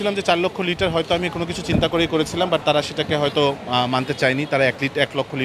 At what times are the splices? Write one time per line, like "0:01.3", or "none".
none